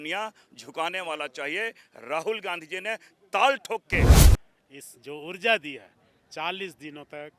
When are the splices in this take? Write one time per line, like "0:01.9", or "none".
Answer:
0:04.2